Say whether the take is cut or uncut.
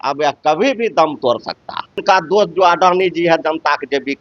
cut